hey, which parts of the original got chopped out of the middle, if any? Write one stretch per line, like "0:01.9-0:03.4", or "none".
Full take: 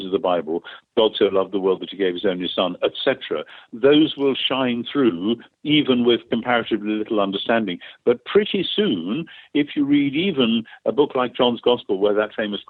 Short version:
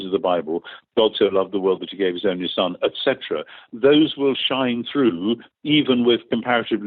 none